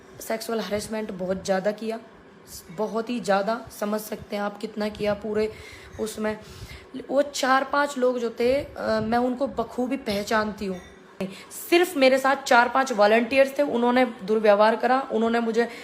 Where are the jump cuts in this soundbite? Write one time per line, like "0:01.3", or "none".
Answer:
0:11.3